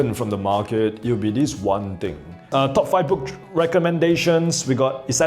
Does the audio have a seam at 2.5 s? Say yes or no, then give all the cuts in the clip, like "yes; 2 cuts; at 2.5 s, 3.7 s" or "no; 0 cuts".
yes; 1 cut; at 2.5 s